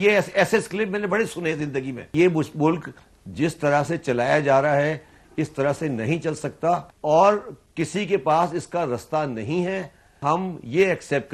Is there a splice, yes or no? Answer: yes